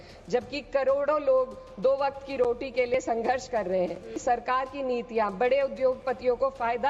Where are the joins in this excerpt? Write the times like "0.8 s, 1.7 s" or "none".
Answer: 4.1 s